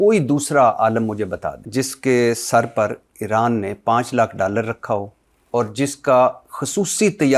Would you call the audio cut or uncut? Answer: cut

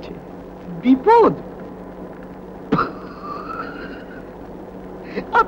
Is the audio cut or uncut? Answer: uncut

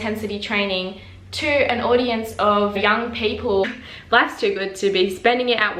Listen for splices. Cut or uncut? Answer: cut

